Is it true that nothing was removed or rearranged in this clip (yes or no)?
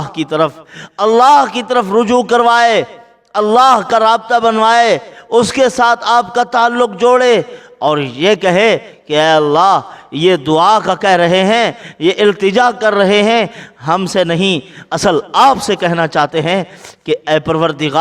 yes